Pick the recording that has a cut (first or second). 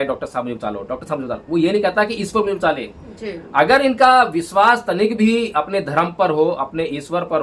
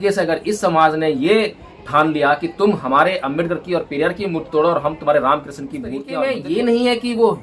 second